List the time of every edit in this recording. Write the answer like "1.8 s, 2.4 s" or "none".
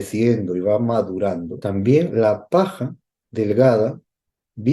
1.5 s